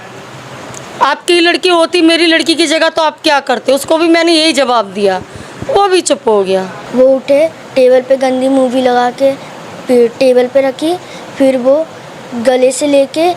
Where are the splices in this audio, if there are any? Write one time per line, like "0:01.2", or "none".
0:06.8